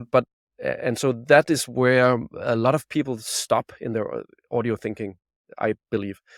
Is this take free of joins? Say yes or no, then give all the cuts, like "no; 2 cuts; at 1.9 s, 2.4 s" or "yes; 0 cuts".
yes; 0 cuts